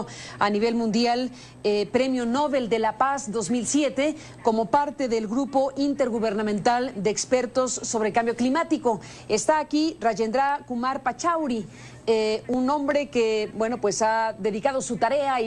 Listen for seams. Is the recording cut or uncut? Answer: cut